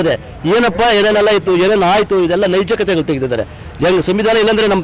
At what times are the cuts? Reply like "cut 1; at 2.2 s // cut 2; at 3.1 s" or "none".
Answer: none